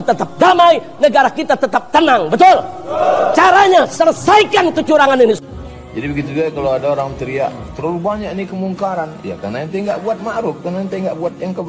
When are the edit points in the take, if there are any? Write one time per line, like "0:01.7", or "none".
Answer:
0:05.4